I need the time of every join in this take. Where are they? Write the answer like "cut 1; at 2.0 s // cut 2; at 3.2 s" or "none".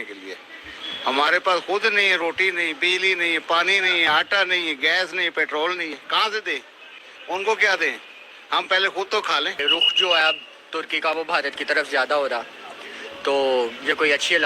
cut 1; at 9.6 s